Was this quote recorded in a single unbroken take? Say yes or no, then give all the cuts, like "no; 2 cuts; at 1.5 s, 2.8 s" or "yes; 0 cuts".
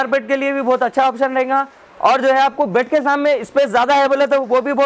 yes; 0 cuts